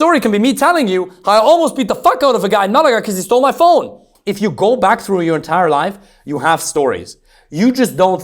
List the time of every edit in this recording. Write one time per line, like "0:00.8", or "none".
0:04.1